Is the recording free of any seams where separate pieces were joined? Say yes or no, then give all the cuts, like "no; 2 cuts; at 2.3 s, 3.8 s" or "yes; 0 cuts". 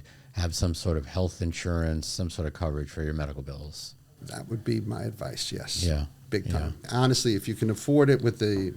no; 1 cut; at 6.8 s